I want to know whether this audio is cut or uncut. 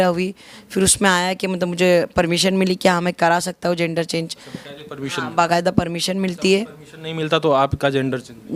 uncut